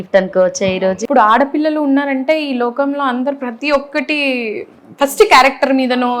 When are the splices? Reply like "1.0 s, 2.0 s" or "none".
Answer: 1.0 s

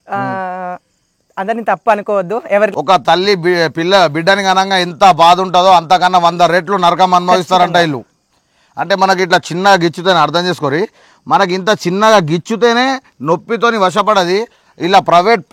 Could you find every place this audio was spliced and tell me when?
2.7 s

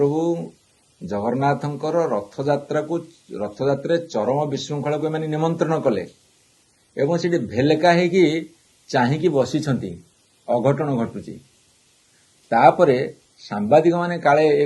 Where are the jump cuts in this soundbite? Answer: none

